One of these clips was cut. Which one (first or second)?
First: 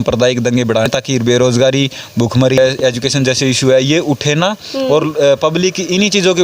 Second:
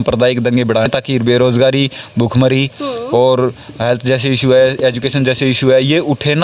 first